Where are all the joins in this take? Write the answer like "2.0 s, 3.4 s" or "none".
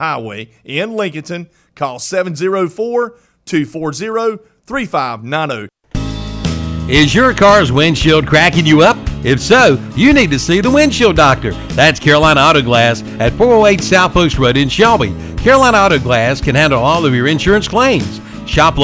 5.8 s